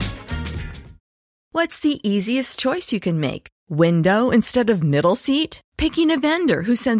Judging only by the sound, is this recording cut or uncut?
cut